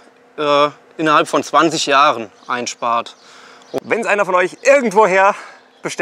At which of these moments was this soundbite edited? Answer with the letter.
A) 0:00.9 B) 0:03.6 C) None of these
B